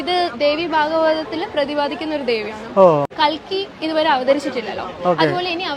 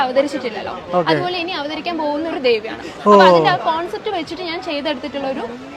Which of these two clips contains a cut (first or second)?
first